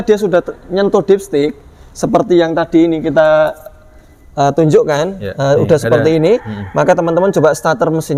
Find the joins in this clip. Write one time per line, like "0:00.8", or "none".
none